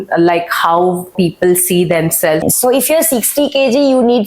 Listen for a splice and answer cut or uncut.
cut